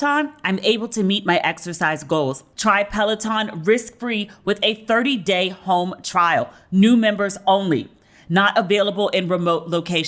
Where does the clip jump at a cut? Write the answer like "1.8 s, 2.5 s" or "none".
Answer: 2.5 s